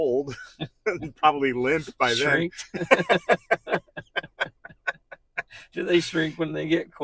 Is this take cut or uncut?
uncut